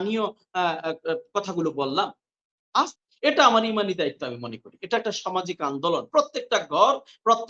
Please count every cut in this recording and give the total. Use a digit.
1